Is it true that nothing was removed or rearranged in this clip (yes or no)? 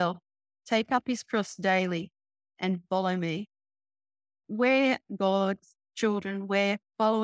no